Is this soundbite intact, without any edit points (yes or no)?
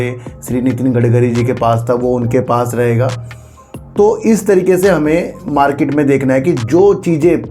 yes